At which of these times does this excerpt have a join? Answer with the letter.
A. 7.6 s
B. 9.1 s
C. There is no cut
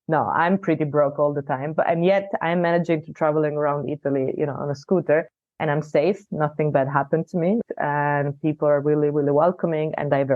A